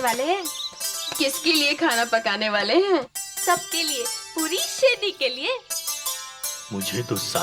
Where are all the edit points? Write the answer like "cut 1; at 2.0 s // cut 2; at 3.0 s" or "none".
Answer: none